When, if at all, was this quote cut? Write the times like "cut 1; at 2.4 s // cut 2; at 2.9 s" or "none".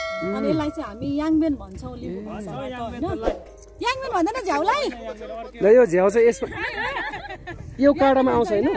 cut 1; at 5.0 s